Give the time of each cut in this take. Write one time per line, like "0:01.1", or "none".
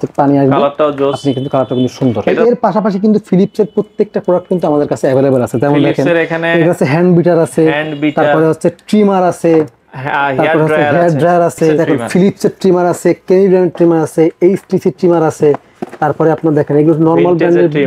0:02.3
0:11.8